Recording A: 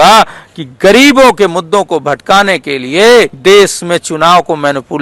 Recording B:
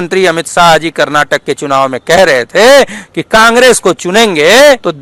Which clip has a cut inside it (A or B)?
A